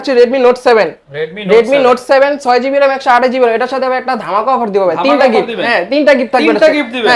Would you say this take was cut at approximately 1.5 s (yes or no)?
no